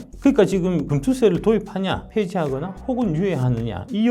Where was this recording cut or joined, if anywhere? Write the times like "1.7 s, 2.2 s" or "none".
0.9 s, 2.0 s